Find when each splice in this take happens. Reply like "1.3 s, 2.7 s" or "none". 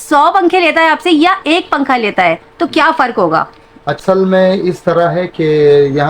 none